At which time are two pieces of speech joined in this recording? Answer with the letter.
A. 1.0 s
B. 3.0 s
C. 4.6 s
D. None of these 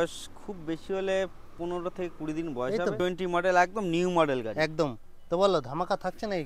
B